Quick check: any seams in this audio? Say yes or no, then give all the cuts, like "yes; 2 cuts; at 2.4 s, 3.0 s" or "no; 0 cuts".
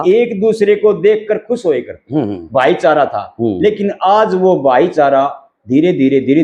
no; 0 cuts